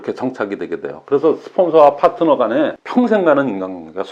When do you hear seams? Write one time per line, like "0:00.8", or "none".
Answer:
0:02.8

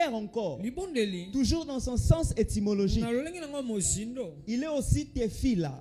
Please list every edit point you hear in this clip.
none

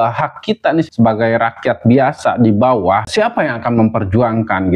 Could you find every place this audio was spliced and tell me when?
0:00.9
0:03.1

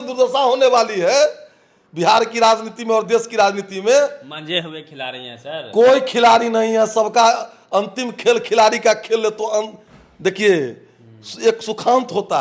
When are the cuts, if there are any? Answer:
none

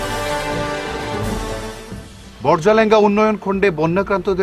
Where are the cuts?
0:01.6

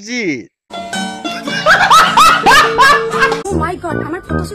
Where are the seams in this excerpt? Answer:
0:03.5

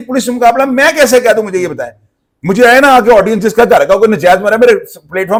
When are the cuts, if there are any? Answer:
none

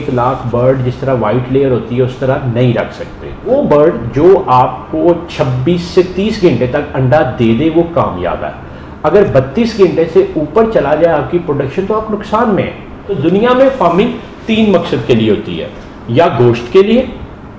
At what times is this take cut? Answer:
0:03.5
0:13.1

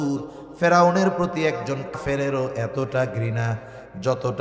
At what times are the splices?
0:02.0

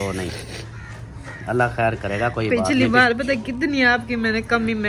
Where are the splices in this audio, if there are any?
none

